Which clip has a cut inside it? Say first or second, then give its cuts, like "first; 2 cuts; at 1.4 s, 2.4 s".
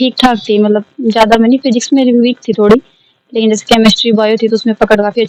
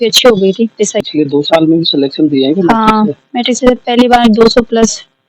second; 1 cut; at 1.0 s